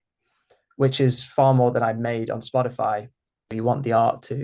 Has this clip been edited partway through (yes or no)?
yes